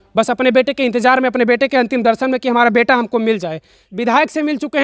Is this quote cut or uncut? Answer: cut